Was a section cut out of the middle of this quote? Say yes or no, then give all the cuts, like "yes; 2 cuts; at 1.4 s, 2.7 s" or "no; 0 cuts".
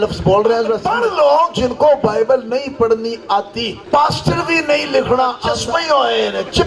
yes; 3 cuts; at 0.9 s, 3.8 s, 5.5 s